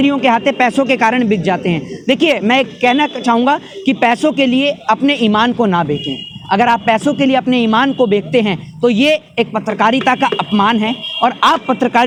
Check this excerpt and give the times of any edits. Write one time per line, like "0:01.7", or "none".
none